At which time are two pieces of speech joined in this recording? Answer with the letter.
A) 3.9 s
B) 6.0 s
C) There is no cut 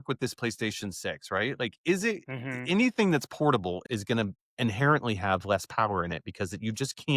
A